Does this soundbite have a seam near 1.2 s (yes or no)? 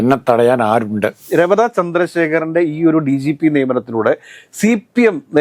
yes